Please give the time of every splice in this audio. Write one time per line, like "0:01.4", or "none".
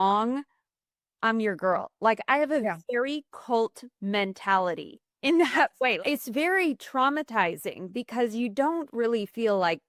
0:06.0